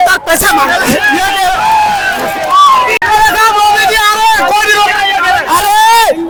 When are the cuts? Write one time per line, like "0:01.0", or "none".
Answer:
none